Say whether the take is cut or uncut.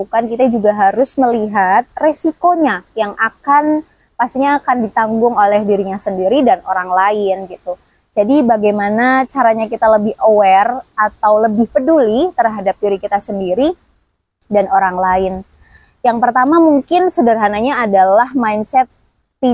uncut